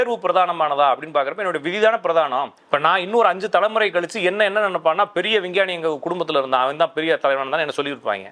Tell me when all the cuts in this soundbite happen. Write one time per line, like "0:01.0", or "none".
0:02.6